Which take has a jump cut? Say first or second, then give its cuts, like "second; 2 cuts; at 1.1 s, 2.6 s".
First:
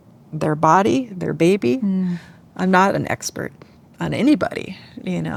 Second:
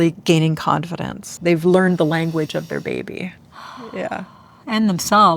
second; 1 cut; at 1.3 s